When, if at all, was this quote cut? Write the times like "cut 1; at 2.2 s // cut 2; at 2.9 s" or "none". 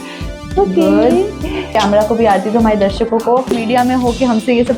cut 1; at 1.7 s // cut 2; at 3.6 s